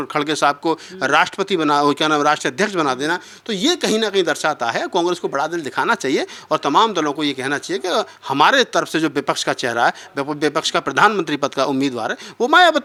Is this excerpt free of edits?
yes; 0 cuts

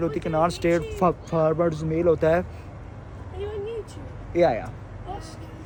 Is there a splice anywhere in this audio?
no; 0 cuts

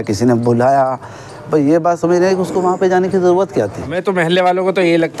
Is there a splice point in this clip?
yes; 1 cut; at 3.8 s

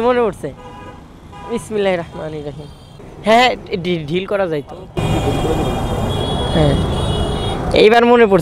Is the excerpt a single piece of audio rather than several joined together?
yes; 0 cuts

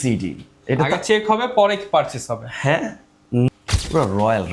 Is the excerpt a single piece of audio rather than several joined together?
no; 1 cut; at 3.5 s

